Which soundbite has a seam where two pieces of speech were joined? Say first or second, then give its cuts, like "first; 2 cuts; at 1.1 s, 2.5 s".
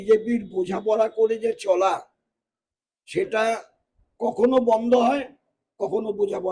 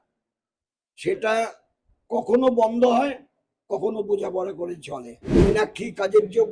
second; 1 cut; at 5.4 s